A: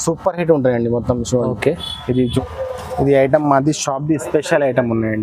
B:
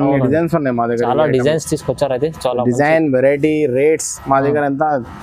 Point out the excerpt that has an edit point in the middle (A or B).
A